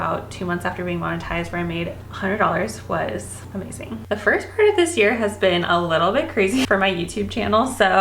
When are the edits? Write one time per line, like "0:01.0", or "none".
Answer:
0:04.0
0:06.7